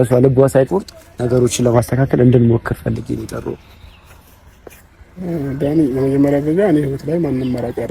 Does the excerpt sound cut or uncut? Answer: uncut